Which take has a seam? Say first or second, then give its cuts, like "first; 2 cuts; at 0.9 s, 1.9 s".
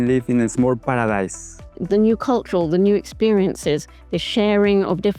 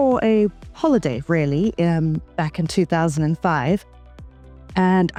first; 1 cut; at 1.7 s